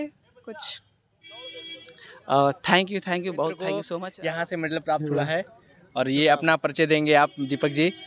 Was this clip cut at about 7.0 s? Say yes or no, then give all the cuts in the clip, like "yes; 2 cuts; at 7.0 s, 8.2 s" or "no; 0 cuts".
no; 1 cut; at 3.9 s